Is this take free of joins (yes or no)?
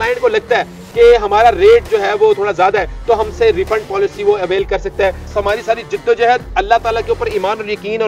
no